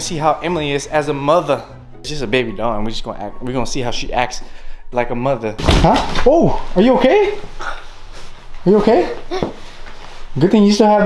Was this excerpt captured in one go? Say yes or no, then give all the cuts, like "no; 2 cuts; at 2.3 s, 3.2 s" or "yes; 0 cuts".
no; 2 cuts; at 2.1 s, 5.6 s